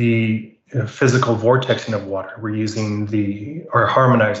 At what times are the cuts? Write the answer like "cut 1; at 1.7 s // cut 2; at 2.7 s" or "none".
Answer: none